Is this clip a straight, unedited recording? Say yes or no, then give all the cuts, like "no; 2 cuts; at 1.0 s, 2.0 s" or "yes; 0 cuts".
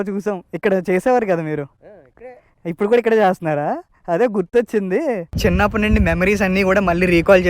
no; 1 cut; at 5.4 s